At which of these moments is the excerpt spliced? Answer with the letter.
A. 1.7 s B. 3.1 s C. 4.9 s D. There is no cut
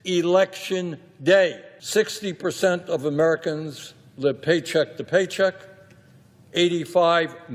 A